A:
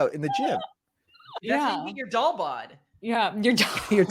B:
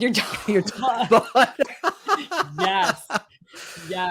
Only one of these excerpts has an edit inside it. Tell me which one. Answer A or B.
A